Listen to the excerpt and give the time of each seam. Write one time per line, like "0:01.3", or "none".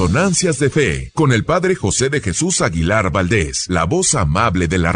0:01.0
0:03.6